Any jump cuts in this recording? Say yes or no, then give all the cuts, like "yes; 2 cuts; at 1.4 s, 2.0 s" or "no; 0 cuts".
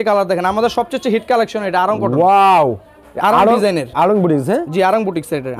no; 0 cuts